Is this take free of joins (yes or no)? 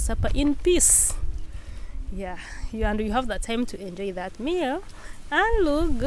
yes